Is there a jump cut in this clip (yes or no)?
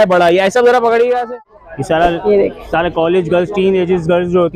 yes